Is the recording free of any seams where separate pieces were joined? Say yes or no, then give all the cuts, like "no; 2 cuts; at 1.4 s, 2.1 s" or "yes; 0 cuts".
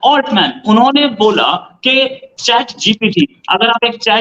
no; 1 cut; at 2.3 s